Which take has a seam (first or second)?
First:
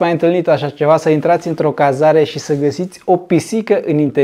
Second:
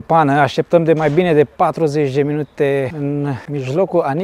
second